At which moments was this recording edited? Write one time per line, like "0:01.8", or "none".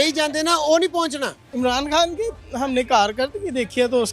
0:01.4